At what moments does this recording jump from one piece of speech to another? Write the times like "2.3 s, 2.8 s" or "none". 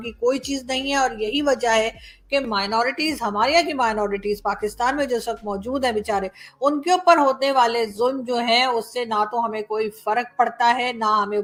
none